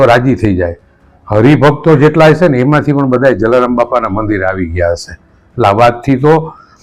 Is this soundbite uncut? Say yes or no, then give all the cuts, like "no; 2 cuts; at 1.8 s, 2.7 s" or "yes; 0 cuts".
yes; 0 cuts